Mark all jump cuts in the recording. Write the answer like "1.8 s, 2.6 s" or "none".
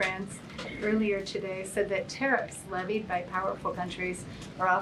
none

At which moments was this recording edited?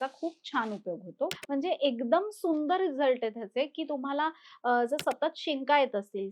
1.4 s

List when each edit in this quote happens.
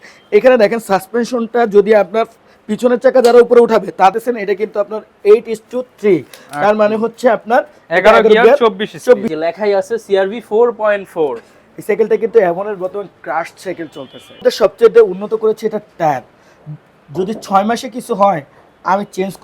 4.1 s, 9.3 s, 14.4 s

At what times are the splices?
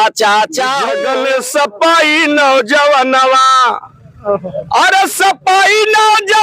1.0 s

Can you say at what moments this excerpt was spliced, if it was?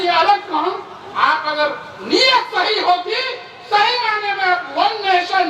none

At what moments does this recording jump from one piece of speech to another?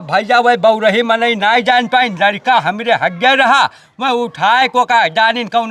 none

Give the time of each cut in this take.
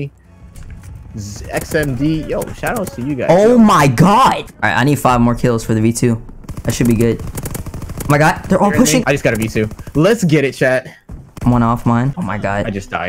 4.6 s, 9.0 s, 12.1 s

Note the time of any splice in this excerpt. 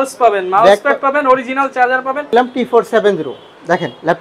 2.3 s

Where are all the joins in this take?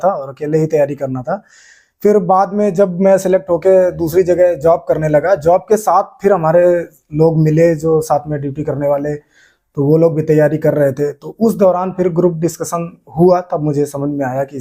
none

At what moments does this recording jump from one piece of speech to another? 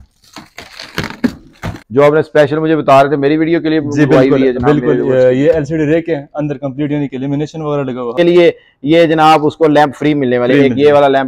1.7 s, 8.2 s

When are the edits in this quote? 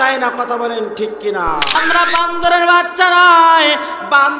1.7 s

